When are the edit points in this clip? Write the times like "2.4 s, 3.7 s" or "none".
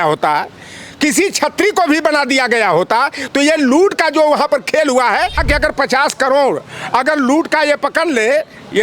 5.4 s